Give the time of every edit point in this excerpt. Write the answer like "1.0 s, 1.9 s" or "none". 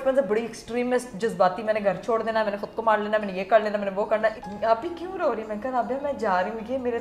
4.4 s